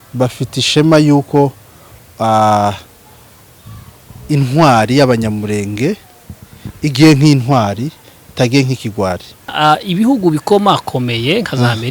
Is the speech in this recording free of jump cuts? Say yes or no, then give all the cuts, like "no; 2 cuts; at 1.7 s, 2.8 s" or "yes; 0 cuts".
no; 1 cut; at 9.5 s